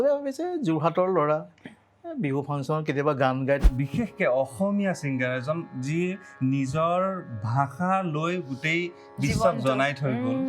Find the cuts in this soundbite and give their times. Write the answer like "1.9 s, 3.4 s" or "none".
3.6 s